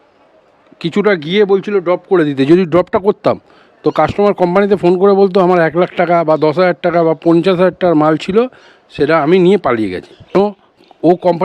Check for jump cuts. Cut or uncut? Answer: cut